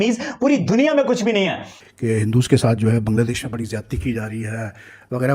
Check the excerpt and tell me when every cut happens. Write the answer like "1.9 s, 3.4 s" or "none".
1.7 s